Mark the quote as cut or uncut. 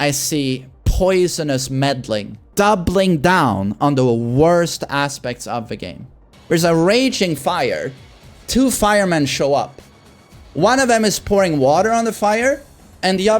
cut